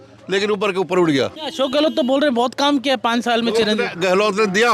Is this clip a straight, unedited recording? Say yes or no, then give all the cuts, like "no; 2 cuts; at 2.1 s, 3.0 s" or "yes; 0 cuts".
no; 1 cut; at 1.4 s